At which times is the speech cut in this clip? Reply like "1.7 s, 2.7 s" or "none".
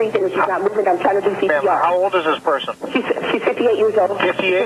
none